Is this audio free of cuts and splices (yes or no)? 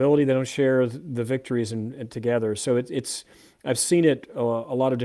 yes